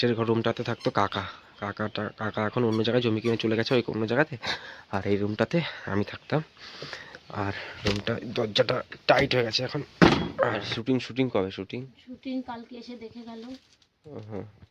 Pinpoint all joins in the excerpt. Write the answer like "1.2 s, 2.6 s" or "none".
10.7 s